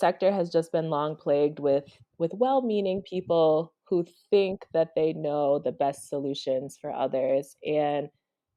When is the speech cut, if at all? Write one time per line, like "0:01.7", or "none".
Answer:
none